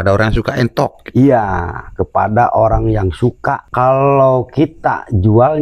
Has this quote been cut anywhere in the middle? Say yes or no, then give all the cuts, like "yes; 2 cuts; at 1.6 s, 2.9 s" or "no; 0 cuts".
yes; 1 cut; at 3.6 s